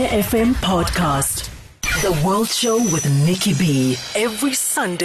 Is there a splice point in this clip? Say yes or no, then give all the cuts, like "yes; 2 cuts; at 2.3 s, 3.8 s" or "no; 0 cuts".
yes; 1 cut; at 1.5 s